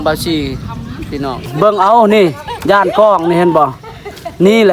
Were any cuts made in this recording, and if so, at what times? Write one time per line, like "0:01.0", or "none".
0:01.5